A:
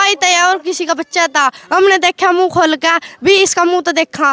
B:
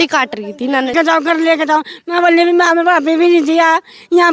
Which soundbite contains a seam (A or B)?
B